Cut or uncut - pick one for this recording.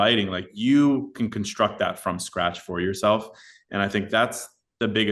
uncut